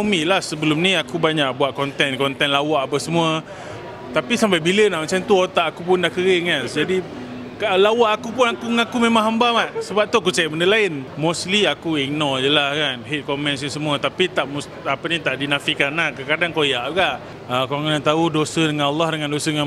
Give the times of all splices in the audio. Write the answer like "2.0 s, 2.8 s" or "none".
11.1 s, 17.3 s